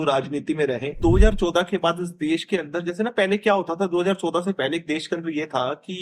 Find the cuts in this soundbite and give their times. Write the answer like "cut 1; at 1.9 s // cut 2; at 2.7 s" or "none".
cut 1; at 1.0 s